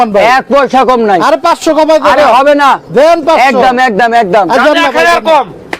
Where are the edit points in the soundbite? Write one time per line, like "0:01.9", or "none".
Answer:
none